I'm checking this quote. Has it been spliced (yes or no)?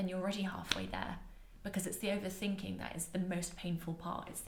no